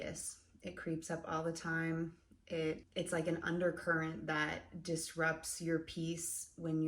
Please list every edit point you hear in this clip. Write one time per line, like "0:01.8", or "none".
0:02.9